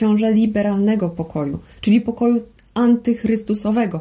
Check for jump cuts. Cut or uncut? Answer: uncut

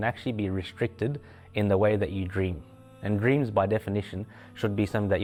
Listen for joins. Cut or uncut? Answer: uncut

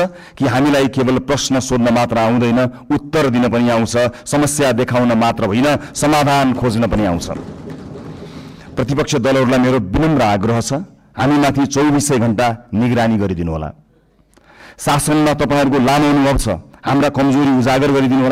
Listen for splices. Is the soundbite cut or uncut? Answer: uncut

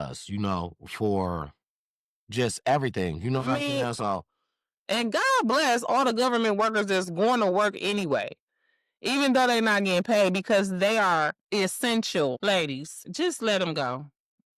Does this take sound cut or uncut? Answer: cut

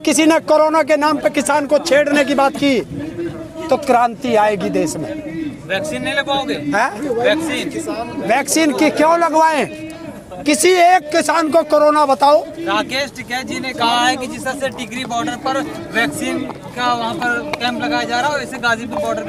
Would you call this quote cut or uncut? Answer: uncut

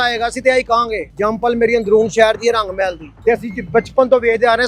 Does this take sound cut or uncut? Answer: cut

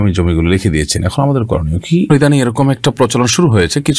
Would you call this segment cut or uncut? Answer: cut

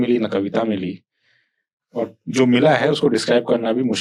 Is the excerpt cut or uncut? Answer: uncut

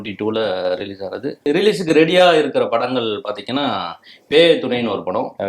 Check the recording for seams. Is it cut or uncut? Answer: cut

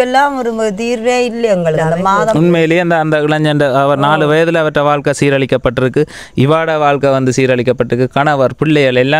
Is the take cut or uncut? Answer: cut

